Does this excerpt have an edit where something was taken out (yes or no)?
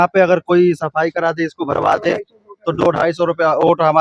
no